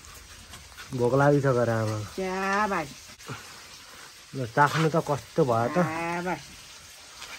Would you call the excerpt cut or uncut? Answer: cut